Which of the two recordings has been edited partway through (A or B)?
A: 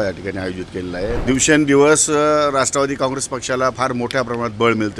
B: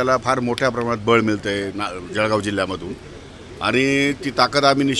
A